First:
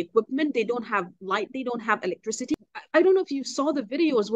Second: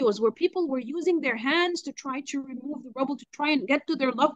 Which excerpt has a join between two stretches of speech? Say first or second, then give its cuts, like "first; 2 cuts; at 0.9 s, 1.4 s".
first; 1 cut; at 2.5 s